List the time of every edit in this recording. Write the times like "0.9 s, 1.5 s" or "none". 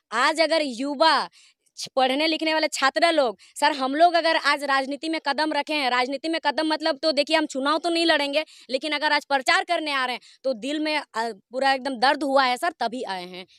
none